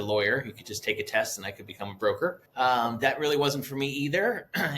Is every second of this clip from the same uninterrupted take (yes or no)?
no